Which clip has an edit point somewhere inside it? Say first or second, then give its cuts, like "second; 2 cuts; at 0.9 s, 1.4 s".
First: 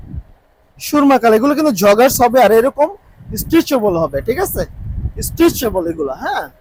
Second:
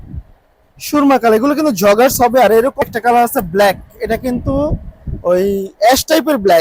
second; 1 cut; at 2.8 s